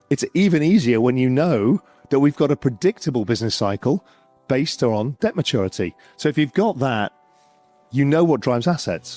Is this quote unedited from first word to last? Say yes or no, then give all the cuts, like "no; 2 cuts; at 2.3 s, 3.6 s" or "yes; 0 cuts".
yes; 0 cuts